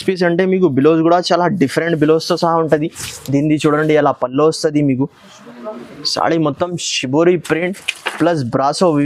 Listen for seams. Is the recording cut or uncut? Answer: uncut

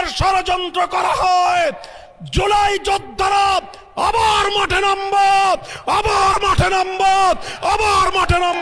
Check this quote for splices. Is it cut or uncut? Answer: uncut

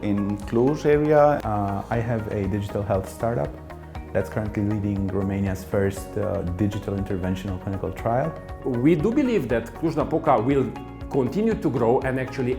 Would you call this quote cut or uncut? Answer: cut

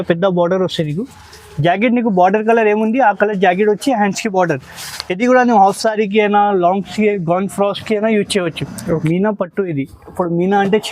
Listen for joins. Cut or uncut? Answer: cut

